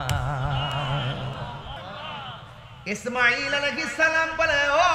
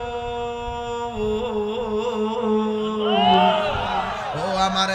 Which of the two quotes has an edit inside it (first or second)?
first